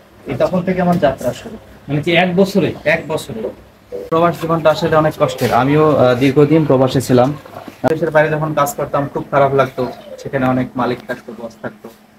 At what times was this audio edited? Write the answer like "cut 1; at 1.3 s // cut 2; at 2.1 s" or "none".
cut 1; at 4.1 s // cut 2; at 7.9 s